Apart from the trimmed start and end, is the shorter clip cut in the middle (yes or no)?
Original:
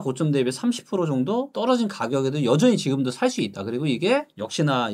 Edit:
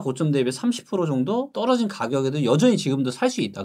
no